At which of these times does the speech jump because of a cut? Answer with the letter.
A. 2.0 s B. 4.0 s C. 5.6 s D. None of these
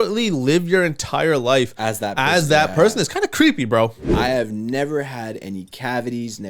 B